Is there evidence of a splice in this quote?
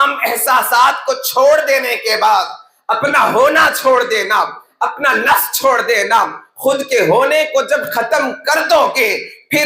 no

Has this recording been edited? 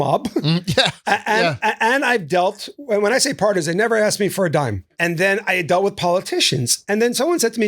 yes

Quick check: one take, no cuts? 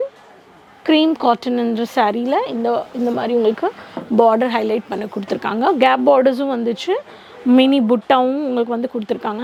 yes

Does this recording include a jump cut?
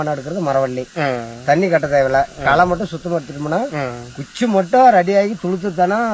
no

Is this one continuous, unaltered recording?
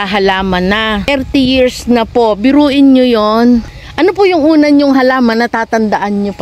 no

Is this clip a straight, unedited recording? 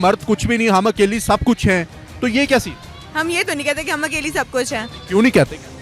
yes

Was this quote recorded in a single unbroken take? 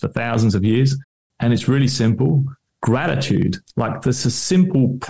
yes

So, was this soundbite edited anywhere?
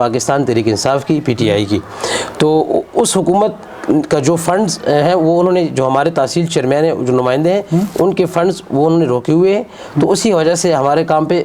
no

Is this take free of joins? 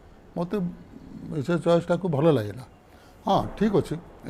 yes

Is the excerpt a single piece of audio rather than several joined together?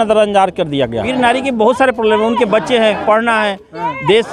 no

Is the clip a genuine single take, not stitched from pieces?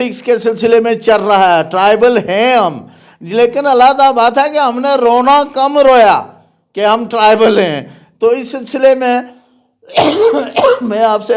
yes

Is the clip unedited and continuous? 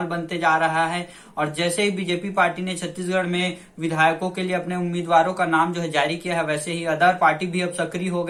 yes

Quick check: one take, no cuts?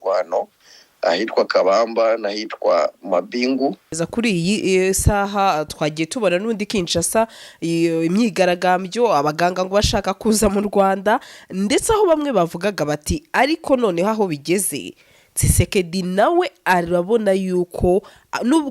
no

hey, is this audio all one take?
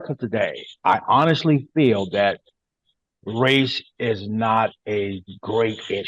yes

